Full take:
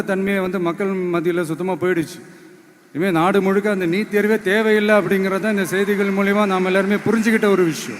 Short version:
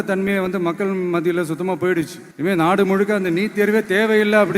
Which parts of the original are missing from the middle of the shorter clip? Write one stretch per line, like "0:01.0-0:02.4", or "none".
0:02.2-0:02.8